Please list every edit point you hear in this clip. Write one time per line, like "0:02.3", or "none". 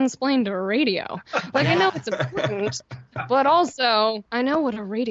none